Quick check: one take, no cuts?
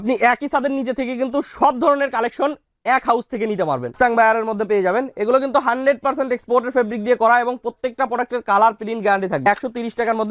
no; 2 cuts; at 3.9 s, 9.4 s

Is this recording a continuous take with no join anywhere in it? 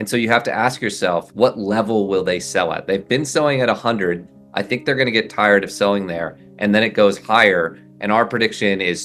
no; 1 cut; at 1.3 s

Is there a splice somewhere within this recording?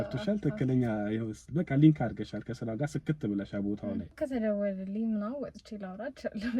yes; 1 cut; at 4.1 s

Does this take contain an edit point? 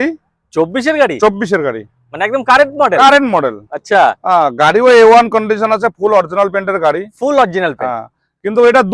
no; 0 cuts

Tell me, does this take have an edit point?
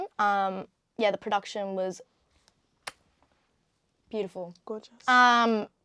no; 0 cuts

